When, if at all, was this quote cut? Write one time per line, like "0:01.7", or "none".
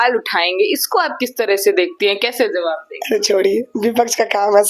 none